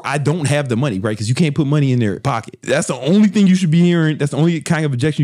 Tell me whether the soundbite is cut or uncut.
cut